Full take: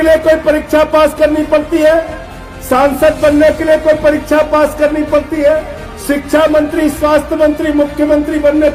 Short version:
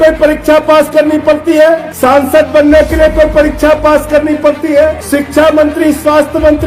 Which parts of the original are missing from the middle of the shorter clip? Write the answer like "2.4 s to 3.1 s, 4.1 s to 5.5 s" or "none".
2.1 s to 2.6 s, 5.7 s to 6.0 s